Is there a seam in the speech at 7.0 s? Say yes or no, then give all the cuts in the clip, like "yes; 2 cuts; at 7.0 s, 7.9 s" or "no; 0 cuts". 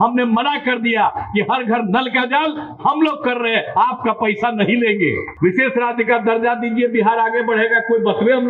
no; 1 cut; at 5.3 s